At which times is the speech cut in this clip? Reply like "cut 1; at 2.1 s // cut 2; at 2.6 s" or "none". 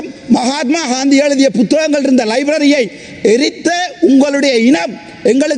none